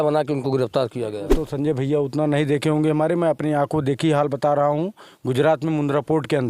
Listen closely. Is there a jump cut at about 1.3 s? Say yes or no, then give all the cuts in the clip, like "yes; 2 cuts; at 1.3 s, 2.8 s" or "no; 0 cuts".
yes; 1 cut; at 1.3 s